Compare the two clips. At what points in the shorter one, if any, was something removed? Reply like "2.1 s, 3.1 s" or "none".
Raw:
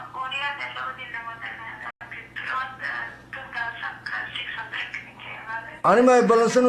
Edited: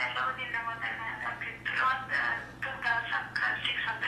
1.4 s